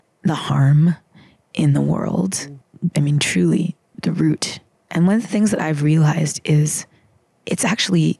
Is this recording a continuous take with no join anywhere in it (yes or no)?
yes